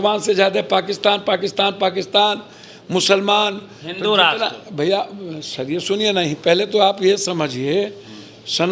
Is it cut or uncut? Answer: uncut